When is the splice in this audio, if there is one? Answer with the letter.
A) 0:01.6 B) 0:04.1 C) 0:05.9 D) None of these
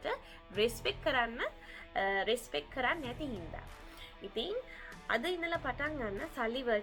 D